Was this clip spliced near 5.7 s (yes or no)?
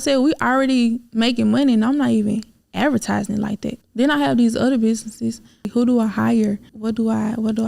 yes